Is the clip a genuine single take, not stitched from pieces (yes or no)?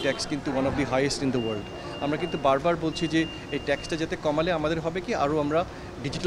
yes